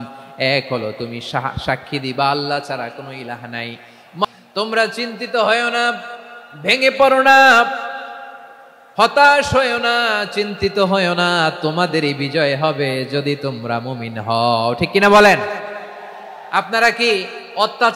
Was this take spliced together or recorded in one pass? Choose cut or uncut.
cut